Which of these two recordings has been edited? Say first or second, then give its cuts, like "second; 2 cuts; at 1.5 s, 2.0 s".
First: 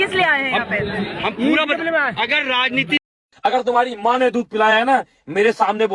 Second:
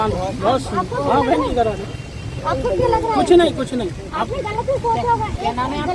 first; 1 cut; at 3.1 s